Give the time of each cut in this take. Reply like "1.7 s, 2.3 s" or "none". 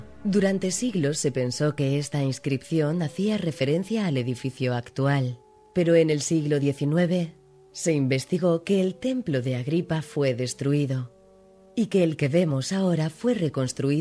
none

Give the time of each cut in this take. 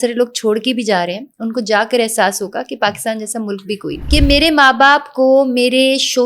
4.0 s

